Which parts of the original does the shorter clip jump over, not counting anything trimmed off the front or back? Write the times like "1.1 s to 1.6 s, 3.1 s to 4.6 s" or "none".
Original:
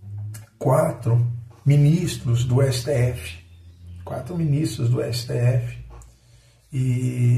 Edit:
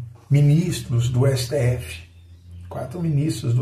none